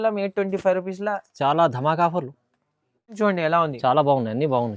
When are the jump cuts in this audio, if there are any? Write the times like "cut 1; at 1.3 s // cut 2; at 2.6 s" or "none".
cut 1; at 3.1 s